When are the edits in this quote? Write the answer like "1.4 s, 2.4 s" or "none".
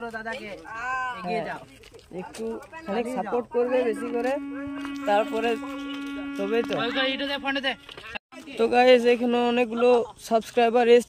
none